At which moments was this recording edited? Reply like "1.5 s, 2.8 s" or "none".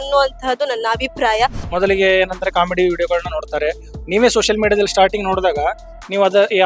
1.6 s